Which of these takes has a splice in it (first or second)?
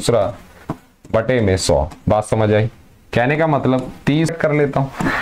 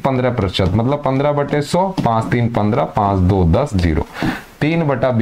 first